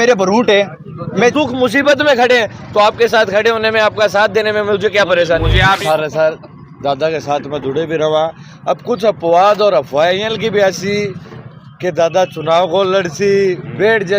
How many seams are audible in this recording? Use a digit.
2